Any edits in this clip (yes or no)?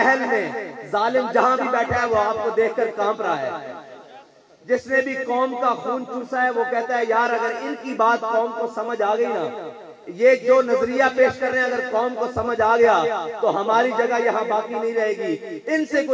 no